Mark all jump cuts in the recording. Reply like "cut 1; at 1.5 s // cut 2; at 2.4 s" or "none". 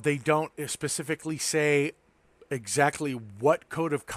cut 1; at 2.1 s

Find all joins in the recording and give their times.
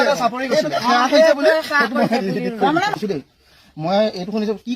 cut 1; at 3.0 s

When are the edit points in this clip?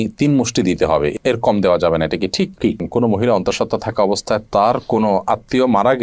cut 1; at 2.7 s

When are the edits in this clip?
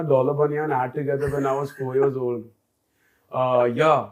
none

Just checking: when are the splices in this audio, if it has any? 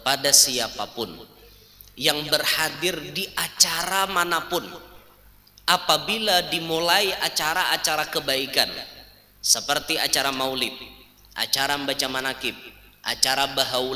none

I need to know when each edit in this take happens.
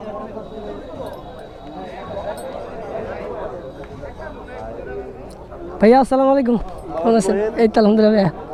none

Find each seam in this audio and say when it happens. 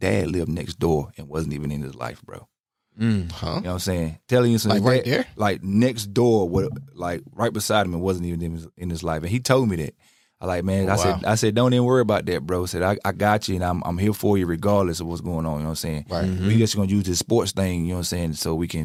none

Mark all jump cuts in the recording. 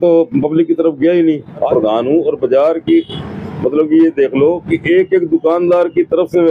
cut 1; at 1.7 s

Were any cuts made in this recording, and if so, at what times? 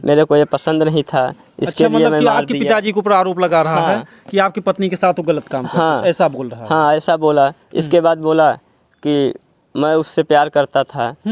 none

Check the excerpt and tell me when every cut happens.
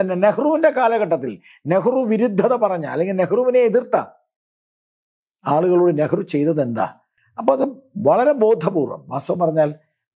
cut 1; at 7.1 s

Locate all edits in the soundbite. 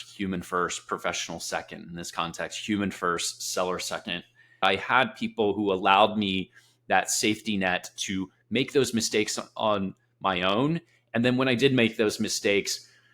cut 1; at 4.6 s

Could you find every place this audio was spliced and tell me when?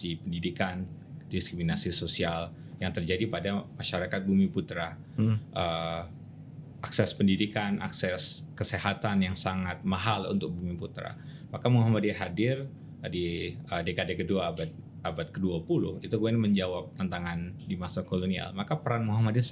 none

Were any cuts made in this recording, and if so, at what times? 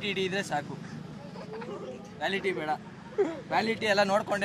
none

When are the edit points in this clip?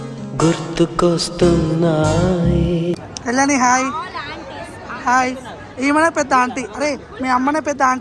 cut 1; at 3.0 s

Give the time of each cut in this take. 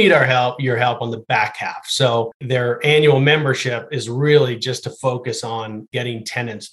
cut 1; at 2.4 s // cut 2; at 5.9 s

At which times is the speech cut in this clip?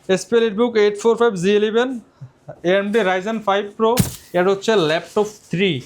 cut 1; at 4.2 s

